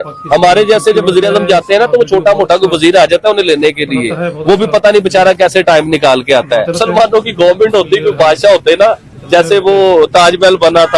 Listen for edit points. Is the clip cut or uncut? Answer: cut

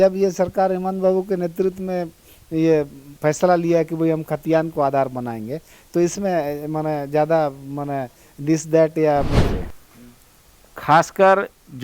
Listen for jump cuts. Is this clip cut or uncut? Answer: cut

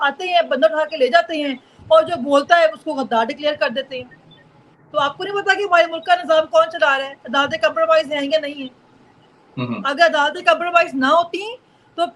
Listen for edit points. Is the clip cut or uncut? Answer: uncut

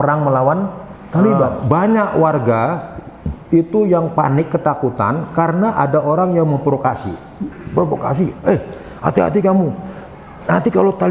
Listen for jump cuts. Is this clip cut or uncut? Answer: cut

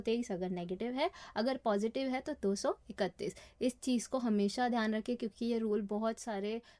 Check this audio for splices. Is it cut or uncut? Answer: uncut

